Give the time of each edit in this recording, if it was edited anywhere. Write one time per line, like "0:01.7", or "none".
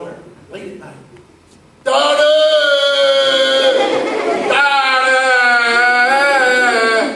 0:02.3